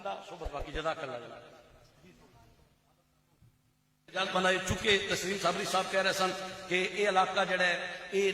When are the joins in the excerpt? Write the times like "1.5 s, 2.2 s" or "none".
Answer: 4.2 s